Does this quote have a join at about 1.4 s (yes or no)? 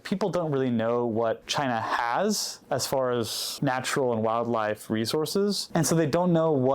yes